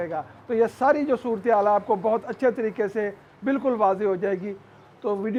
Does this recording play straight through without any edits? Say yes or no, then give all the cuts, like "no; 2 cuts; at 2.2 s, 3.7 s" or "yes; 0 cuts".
yes; 0 cuts